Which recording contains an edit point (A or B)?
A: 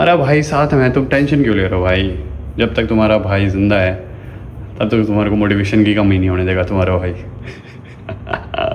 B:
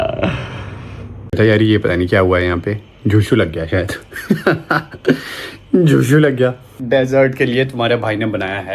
B